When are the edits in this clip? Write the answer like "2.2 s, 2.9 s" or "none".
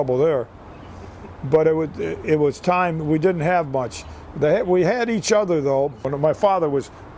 6.1 s

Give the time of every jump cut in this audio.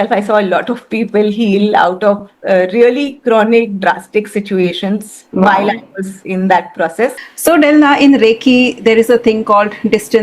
7.3 s

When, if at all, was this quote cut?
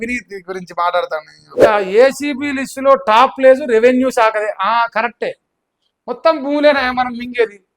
1.4 s

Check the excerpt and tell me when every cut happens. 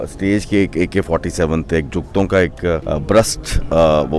2.8 s

